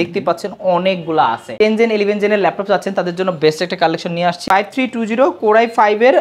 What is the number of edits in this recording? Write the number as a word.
two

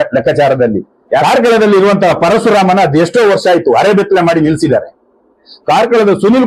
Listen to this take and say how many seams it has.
two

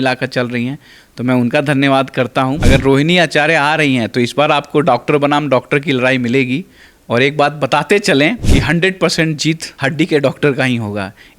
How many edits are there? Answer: three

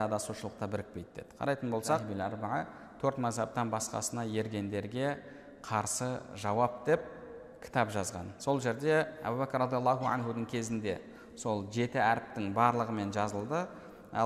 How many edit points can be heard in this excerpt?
two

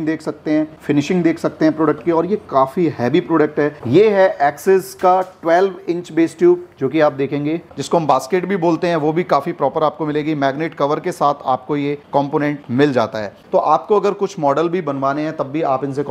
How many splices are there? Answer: three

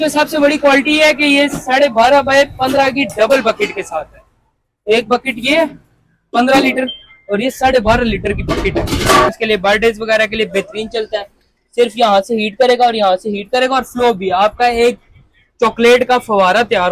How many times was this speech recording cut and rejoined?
one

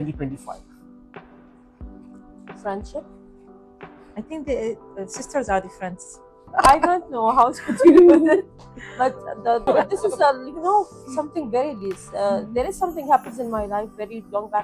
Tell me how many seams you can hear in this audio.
two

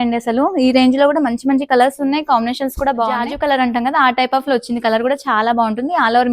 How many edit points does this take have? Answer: one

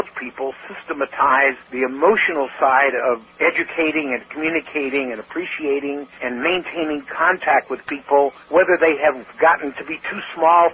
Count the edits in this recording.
five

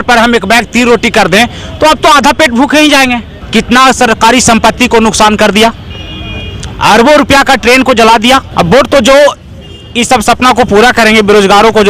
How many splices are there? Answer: two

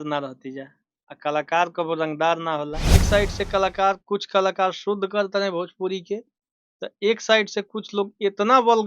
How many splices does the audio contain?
one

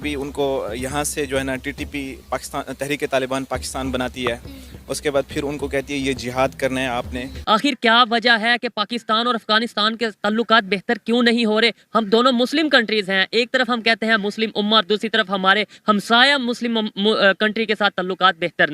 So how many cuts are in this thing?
one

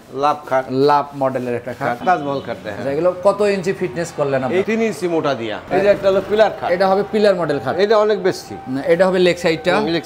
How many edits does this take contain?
two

